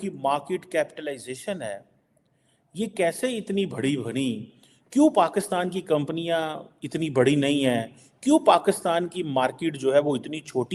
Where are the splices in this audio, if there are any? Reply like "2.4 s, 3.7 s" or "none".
none